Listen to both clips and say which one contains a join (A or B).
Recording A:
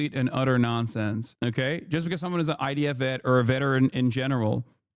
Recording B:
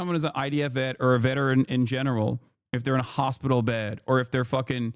A